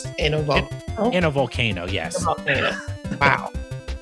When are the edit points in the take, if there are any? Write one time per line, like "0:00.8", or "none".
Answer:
none